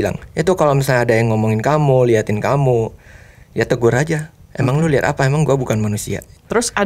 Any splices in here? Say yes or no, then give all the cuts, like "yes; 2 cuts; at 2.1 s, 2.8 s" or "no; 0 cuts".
no; 0 cuts